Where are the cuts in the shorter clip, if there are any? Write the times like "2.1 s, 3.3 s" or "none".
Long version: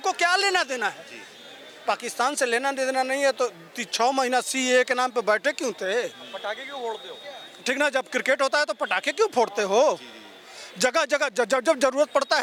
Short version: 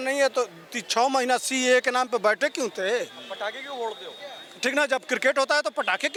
none